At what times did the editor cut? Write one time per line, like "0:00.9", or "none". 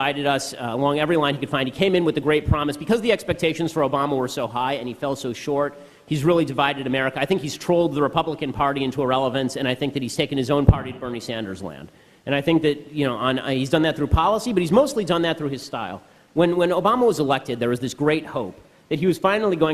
0:13.7